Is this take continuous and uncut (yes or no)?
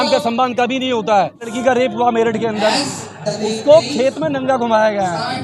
no